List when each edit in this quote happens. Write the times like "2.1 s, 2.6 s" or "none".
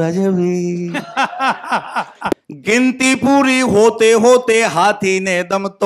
2.3 s